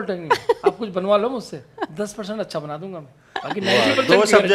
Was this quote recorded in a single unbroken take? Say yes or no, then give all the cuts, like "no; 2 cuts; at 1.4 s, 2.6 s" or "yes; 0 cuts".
yes; 0 cuts